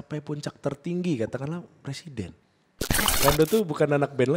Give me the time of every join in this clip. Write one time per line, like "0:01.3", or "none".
0:02.9